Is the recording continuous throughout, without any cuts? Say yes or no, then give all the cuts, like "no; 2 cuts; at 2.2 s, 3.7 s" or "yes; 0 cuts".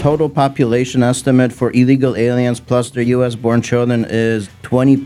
yes; 0 cuts